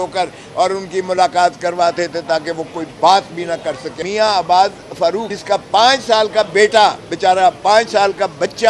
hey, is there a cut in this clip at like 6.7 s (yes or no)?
no